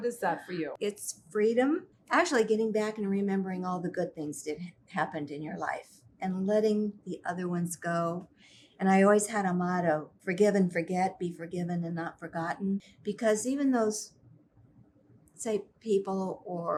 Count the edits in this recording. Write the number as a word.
zero